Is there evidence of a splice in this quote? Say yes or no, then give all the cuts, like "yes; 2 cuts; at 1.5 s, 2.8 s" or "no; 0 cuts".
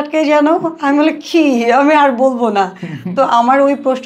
no; 0 cuts